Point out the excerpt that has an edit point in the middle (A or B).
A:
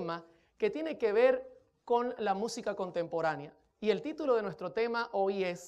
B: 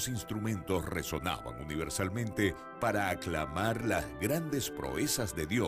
A